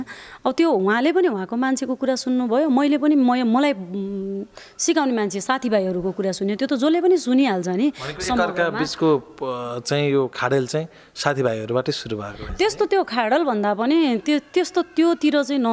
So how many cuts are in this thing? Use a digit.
0